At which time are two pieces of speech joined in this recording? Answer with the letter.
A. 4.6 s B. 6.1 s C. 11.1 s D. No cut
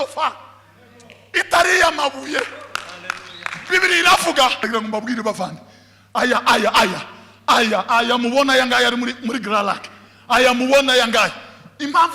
A